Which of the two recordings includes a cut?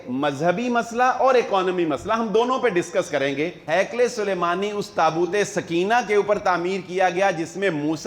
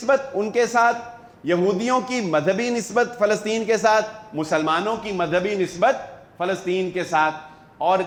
first; 1 cut; at 3.6 s

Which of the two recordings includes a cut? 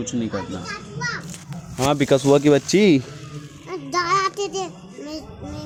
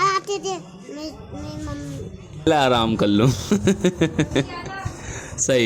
second; 1 cut; at 2.5 s

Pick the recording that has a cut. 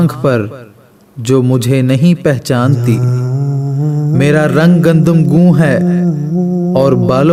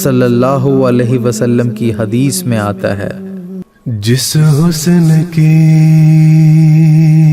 second; 1 cut; at 3.6 s

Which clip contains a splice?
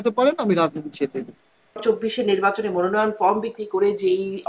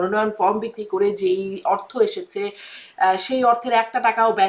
first; 1 cut; at 1.8 s

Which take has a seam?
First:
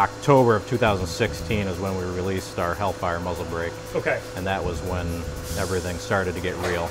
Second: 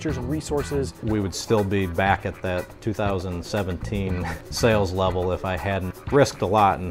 second; 3 cuts; at 0.9 s, 4.3 s, 5.9 s

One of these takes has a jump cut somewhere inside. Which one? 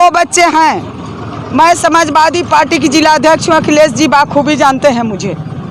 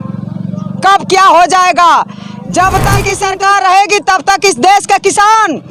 second; 1 cut; at 3.2 s

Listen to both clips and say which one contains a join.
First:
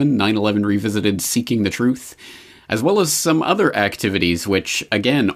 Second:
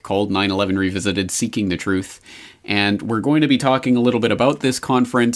first; 1 cut; at 3.2 s

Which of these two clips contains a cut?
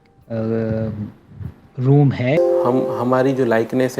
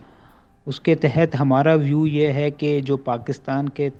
first; 1 cut; at 2.4 s

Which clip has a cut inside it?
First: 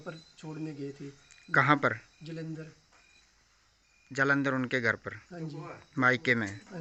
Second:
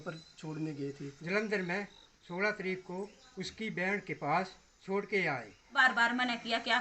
second; 2 cuts; at 1.1 s, 5.7 s

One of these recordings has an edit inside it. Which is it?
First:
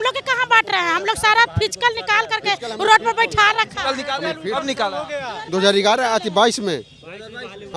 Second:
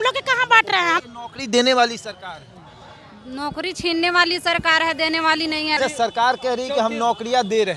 second; 2 cuts; at 1.0 s, 5.8 s

